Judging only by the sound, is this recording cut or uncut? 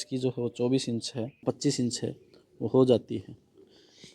cut